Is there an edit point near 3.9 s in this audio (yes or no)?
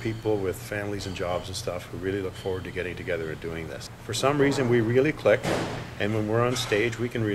yes